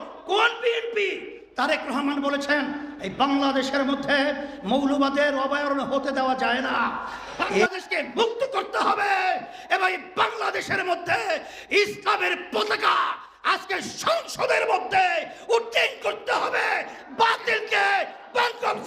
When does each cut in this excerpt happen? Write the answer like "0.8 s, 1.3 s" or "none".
7.6 s